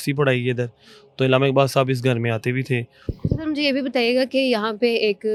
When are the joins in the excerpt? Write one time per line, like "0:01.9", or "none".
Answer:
none